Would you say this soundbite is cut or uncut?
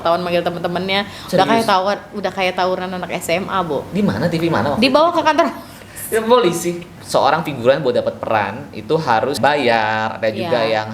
cut